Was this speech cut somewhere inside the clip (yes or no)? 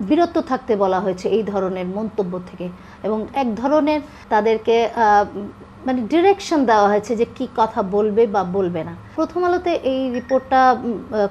yes